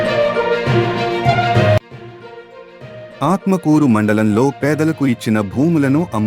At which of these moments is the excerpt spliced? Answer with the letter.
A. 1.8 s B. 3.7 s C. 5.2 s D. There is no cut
A